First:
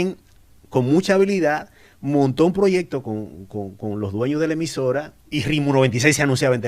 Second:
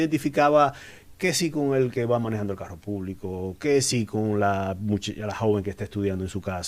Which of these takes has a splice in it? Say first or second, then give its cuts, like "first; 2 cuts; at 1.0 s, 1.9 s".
first; 1 cut; at 5.2 s